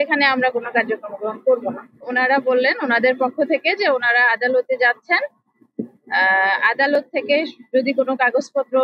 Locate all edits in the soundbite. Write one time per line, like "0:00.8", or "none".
0:02.0